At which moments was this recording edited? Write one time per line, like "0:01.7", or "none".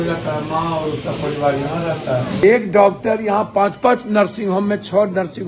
0:02.4